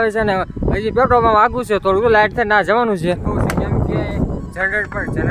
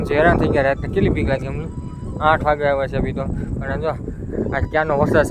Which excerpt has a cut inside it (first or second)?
first